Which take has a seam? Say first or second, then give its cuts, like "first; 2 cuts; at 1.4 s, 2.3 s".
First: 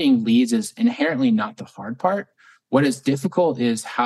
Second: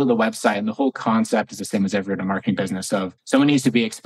second; 1 cut; at 3.1 s